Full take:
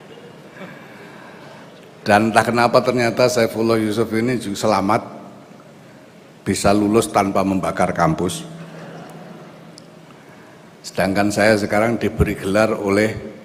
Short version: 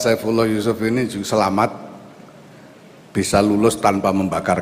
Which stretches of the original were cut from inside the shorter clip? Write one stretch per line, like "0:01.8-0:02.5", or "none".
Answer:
none